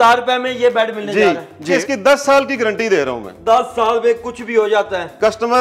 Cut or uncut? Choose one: cut